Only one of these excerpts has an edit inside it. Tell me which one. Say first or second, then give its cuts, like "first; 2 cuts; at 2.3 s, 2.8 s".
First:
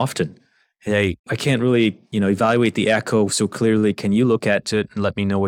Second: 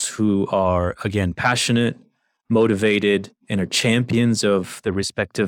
first; 1 cut; at 1.2 s